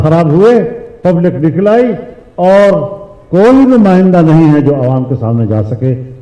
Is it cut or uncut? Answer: uncut